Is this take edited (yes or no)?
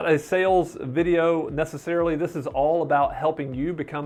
no